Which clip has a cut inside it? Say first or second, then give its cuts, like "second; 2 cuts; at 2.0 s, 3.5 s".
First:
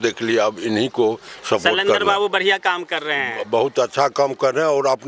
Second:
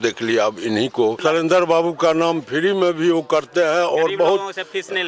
second; 1 cut; at 1.2 s